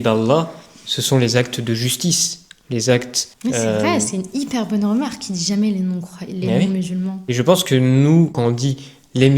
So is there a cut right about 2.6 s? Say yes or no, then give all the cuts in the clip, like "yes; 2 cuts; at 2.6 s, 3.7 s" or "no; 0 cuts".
no; 2 cuts; at 7.2 s, 8.4 s